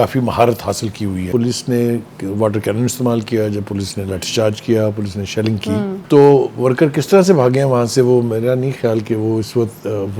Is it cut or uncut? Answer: cut